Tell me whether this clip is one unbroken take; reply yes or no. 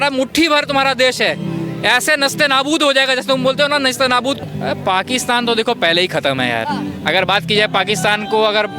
no